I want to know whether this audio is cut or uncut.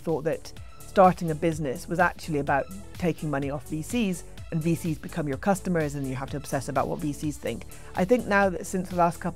uncut